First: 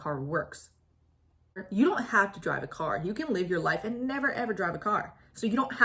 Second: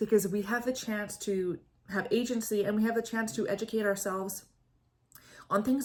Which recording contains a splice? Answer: first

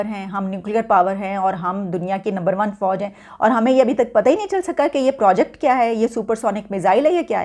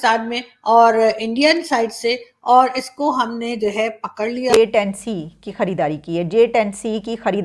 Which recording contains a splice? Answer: second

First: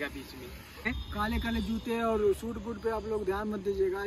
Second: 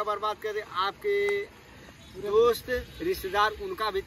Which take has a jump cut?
first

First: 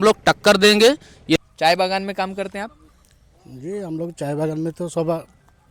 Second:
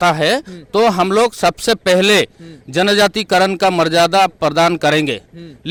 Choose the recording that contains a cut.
first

